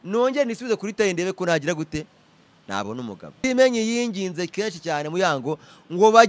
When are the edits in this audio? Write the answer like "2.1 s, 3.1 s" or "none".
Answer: 3.3 s